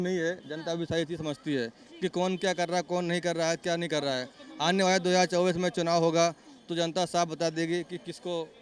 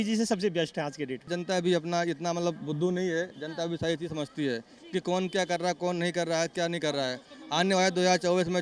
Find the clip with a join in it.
second; 1 cut; at 1.3 s

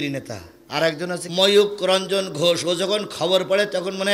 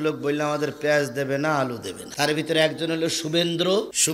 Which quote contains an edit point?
first; 1 cut; at 1.3 s

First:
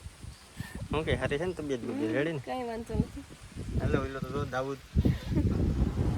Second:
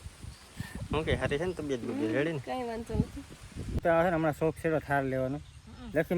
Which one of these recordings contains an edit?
second; 1 cut; at 3.8 s

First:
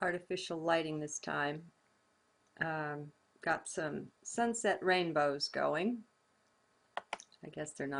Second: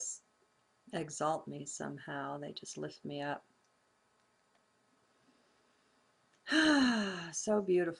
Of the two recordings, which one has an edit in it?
second; 1 cut; at 2.1 s

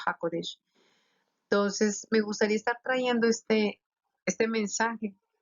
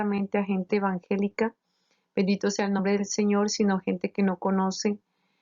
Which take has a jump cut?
second; 1 cut; at 4.1 s

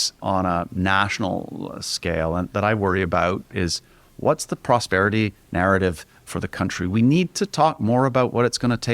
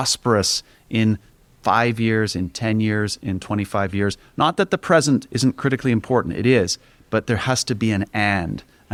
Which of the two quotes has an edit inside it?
first; 1 cut; at 3.5 s

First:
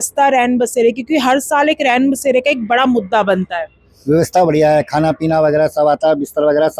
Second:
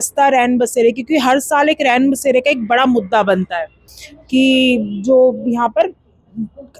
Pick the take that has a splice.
second; 1 cut; at 3.9 s

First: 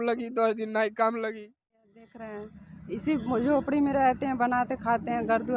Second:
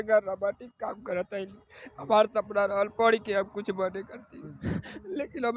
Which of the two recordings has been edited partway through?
first; 1 cut; at 1.9 s

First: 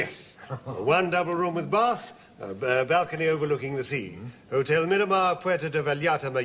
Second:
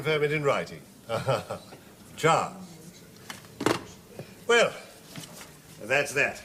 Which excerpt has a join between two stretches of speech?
first; 1 cut; at 3.9 s

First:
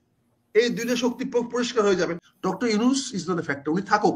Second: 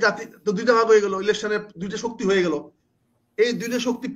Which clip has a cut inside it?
first; 1 cut; at 2.3 s

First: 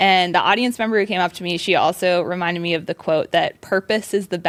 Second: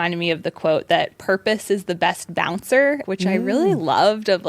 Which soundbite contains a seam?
second; 1 cut; at 3.0 s

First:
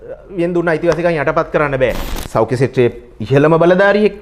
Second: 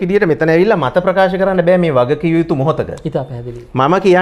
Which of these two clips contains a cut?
first; 1 cut; at 2.2 s

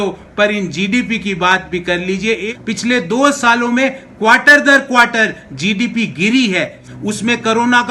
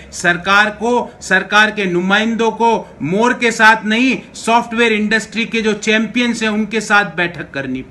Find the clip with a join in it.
first; 2 cuts; at 2.5 s, 6.8 s

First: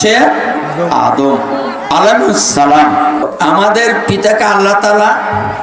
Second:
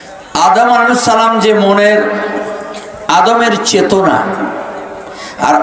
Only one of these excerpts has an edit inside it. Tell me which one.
first; 1 cut; at 3.2 s

